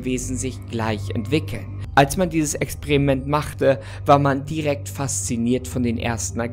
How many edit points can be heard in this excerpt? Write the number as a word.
one